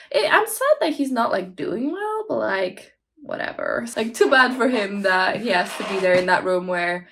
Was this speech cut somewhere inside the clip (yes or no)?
no